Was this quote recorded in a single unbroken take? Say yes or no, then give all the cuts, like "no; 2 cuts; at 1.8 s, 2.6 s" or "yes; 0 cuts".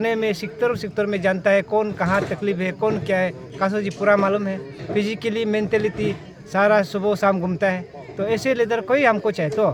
yes; 0 cuts